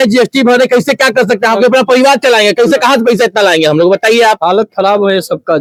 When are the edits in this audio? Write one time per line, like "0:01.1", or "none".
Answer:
none